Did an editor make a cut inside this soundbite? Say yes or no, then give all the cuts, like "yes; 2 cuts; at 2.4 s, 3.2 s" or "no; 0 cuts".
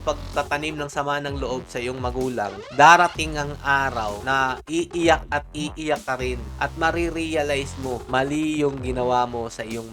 yes; 3 cuts; at 4.4 s, 6.5 s, 8.0 s